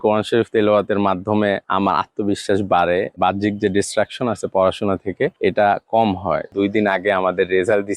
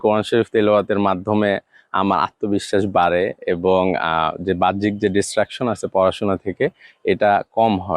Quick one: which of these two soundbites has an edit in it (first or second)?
first